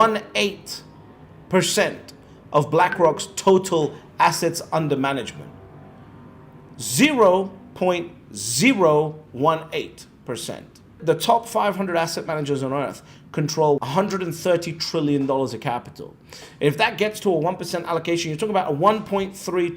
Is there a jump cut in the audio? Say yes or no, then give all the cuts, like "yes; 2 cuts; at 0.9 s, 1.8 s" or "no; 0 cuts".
yes; 2 cuts; at 11.0 s, 13.9 s